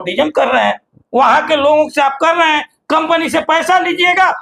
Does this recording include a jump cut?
no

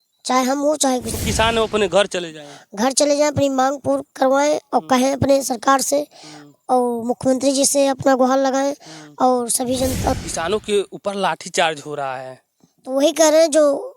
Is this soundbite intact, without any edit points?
no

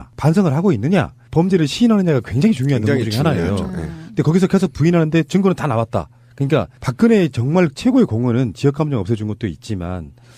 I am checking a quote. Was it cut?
no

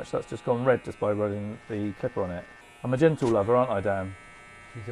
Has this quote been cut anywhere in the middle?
yes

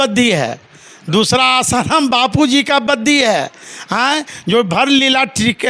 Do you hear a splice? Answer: no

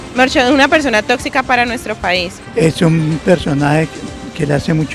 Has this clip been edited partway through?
yes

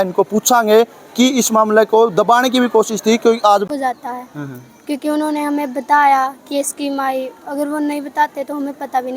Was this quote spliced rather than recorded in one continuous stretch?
yes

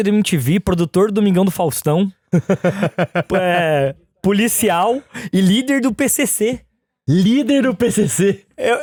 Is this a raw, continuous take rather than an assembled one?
yes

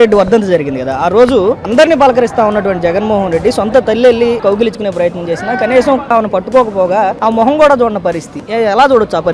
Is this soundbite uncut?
no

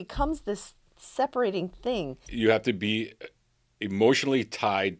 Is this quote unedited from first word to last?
no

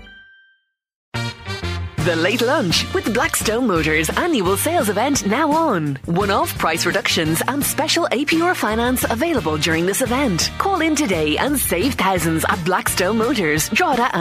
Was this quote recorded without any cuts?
no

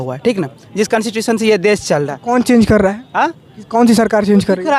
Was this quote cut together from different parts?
no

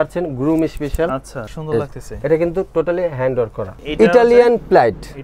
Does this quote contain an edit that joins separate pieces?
yes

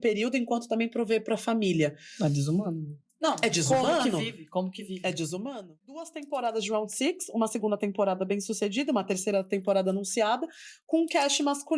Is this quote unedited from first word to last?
no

